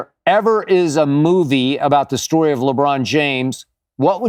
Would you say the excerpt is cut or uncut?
uncut